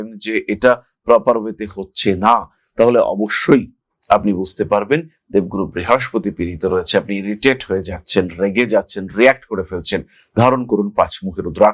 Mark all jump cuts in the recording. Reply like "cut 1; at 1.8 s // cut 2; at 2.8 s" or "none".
none